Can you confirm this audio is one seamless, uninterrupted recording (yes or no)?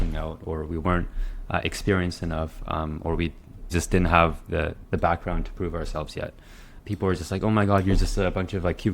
no